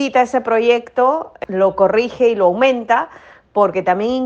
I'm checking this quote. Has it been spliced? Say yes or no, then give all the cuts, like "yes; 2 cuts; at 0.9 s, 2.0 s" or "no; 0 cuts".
yes; 1 cut; at 1.3 s